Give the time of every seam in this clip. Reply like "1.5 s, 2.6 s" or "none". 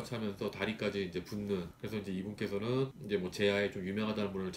1.7 s